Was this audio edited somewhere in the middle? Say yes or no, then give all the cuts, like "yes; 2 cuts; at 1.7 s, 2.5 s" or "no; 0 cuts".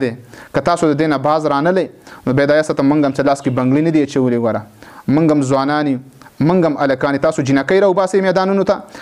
no; 0 cuts